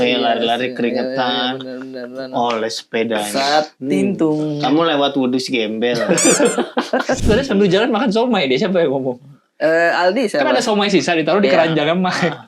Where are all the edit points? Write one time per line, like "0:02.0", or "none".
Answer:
0:07.2